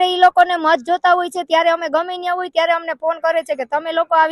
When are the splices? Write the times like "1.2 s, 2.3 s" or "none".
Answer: none